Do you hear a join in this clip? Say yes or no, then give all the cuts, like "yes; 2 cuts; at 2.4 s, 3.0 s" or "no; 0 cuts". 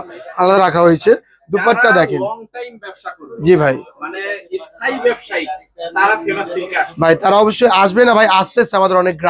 no; 0 cuts